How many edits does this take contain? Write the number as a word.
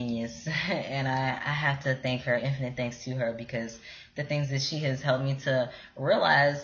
one